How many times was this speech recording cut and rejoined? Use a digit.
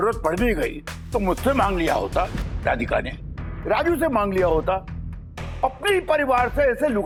0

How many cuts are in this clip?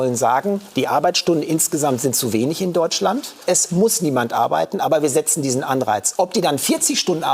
1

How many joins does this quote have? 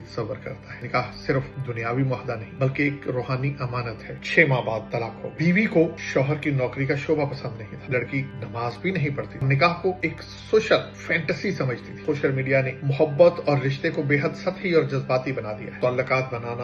7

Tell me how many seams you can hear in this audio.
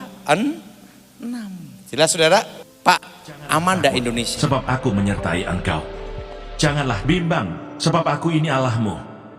2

